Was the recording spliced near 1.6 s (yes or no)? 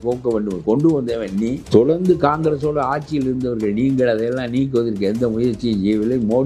yes